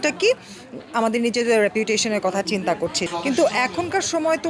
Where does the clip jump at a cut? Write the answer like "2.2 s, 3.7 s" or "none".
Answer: 3.0 s